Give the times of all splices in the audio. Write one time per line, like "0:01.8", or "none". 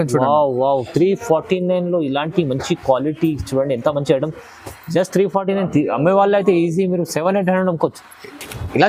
none